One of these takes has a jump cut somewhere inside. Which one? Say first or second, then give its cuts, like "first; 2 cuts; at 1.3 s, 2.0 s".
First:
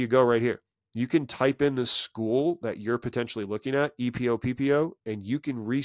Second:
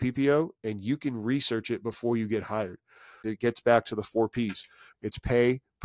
second; 2 cuts; at 3.3 s, 4.8 s